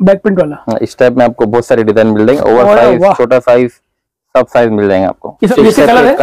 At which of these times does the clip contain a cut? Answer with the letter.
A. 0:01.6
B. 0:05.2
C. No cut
B